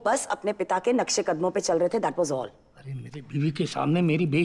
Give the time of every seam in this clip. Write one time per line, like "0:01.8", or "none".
none

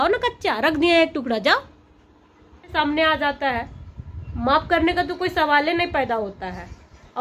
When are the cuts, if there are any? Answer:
0:02.7

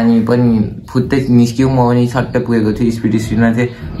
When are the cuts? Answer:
none

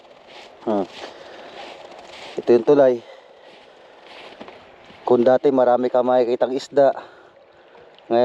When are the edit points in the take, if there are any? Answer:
0:04.4

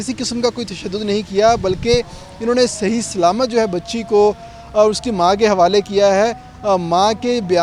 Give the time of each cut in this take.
none

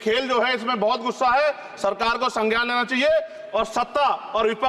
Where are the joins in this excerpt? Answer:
none

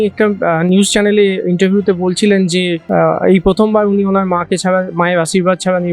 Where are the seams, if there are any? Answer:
0:02.8

